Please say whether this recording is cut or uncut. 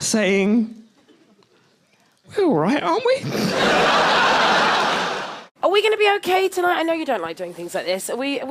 uncut